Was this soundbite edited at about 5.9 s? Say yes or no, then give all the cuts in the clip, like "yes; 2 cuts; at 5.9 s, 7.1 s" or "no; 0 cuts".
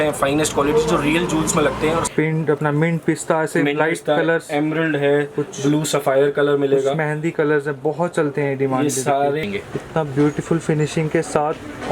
no; 2 cuts; at 2.1 s, 9.5 s